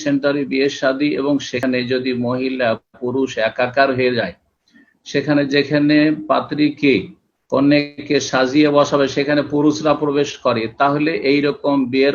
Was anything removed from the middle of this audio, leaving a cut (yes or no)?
yes